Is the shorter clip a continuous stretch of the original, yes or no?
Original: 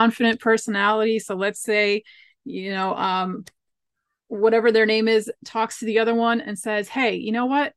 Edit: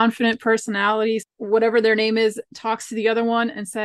no